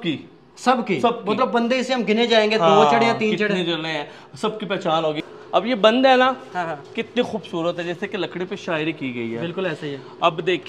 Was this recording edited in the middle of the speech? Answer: yes; 1 cut; at 5.2 s

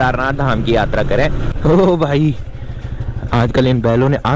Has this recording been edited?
yes; 1 cut; at 1.5 s

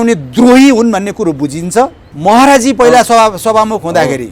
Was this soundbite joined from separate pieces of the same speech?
yes; 1 cut; at 2.1 s

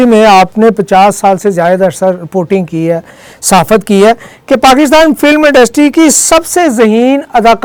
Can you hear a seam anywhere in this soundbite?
no; 0 cuts

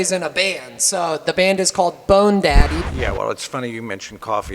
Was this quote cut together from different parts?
yes; 1 cut; at 2.8 s

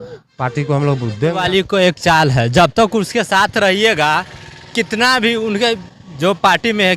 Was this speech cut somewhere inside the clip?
yes; 1 cut; at 1.3 s

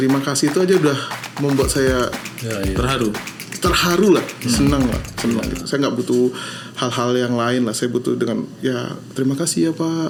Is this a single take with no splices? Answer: yes; 0 cuts

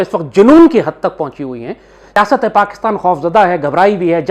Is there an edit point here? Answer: yes; 1 cut; at 2.1 s

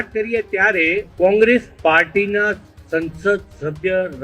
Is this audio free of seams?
no; 1 cut; at 1.1 s

